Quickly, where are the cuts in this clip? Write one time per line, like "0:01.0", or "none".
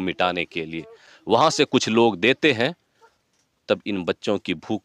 none